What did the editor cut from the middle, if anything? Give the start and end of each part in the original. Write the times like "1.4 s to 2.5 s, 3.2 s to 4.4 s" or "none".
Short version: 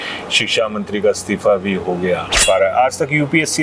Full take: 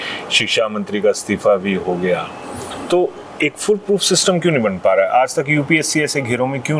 2.4 s to 4.8 s